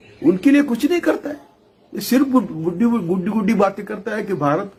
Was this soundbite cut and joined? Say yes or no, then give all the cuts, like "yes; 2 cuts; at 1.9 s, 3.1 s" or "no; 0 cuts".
no; 0 cuts